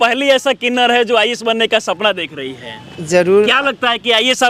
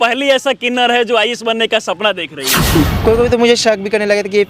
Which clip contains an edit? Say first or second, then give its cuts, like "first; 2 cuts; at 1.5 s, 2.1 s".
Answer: second; 1 cut; at 2.7 s